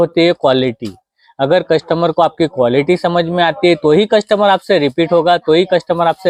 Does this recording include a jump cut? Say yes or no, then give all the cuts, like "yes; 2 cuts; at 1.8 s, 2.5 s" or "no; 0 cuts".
no; 0 cuts